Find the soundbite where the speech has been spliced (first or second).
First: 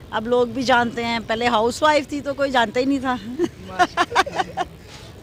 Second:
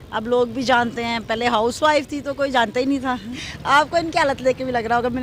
second